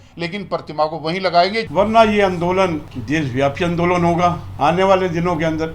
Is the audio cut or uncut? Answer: cut